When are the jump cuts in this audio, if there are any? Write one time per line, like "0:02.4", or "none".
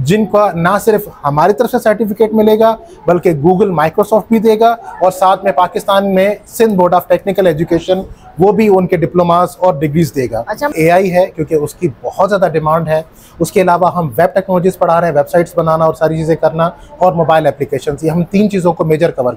0:10.7